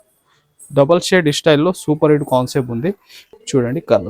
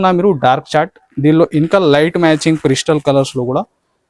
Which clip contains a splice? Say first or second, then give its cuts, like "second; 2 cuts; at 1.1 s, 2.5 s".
first; 1 cut; at 3.1 s